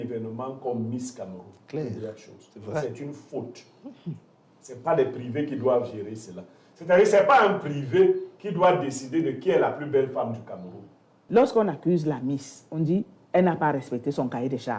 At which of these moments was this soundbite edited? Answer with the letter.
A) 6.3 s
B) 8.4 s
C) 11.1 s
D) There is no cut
C